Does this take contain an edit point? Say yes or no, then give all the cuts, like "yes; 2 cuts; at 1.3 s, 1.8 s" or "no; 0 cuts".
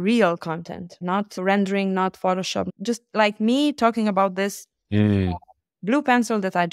yes; 2 cuts; at 1.0 s, 2.7 s